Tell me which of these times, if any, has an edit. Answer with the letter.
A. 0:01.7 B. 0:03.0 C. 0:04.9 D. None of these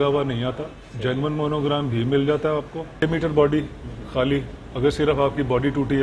B